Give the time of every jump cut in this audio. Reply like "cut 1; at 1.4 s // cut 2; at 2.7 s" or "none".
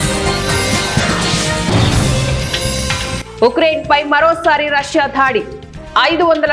cut 1; at 3.2 s